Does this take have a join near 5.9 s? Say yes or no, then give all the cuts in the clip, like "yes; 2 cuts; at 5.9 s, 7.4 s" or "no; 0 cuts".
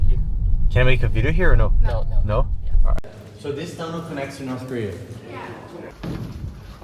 yes; 2 cuts; at 3.0 s, 5.9 s